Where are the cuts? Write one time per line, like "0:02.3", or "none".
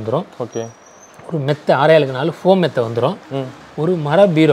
none